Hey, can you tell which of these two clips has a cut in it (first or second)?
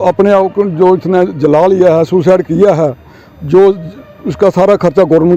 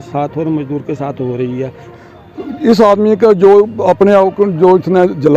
second